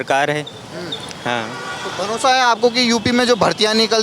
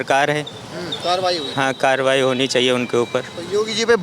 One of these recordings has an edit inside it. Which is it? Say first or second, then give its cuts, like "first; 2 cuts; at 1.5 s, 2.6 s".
second; 1 cut; at 1.0 s